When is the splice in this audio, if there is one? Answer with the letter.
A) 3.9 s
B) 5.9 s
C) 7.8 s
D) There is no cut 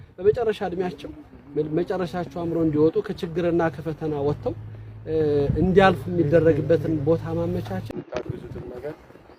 C